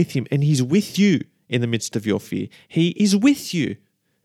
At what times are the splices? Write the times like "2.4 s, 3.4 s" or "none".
none